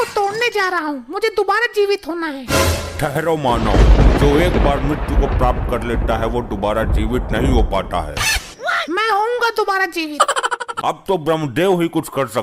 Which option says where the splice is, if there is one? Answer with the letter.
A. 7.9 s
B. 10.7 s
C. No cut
B